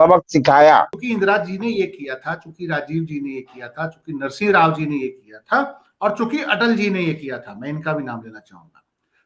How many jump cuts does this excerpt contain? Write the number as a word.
one